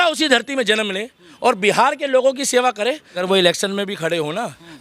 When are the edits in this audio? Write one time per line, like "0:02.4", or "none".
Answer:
0:03.2